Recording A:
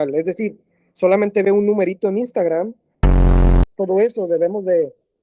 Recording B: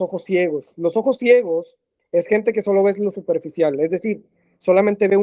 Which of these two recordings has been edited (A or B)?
A